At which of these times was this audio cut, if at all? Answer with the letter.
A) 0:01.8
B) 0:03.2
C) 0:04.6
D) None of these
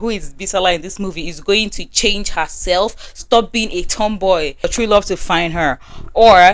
C